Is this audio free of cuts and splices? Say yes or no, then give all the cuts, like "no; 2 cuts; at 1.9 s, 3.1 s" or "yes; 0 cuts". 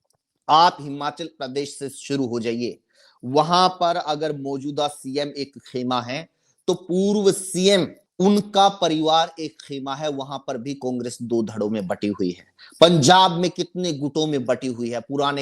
no; 1 cut; at 8.0 s